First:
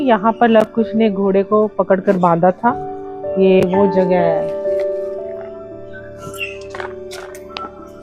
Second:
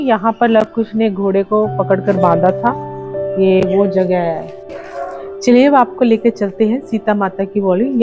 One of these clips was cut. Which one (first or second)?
second